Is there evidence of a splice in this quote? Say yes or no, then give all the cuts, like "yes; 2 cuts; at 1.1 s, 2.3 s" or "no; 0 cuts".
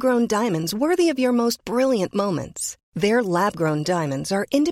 no; 0 cuts